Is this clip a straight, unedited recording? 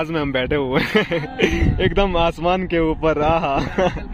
yes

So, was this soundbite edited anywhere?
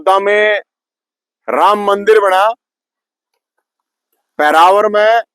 no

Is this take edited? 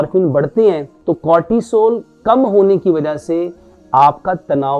yes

